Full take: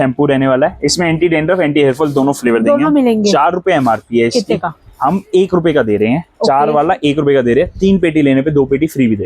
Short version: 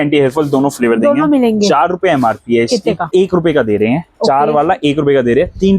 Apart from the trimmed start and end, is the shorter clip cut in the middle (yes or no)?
yes